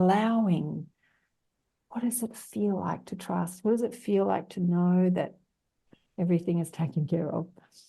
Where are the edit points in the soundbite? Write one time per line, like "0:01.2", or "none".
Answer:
0:05.8

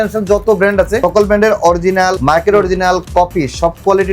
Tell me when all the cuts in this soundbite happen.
0:01.0
0:02.2

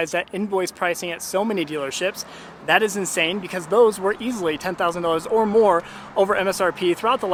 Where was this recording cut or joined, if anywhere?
none

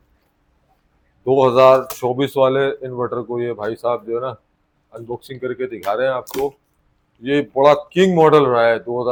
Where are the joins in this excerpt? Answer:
none

